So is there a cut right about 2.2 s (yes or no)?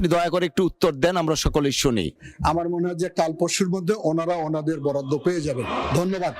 yes